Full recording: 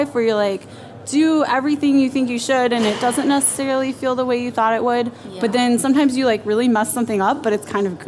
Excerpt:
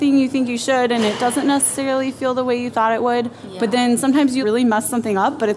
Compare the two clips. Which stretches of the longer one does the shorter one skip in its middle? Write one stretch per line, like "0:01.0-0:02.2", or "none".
0:06.2-0:06.4